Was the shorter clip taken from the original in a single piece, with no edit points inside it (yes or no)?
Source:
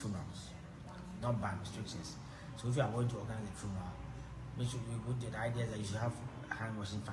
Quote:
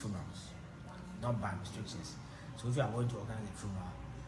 yes